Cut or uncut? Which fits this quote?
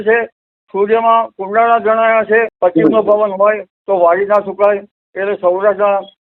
cut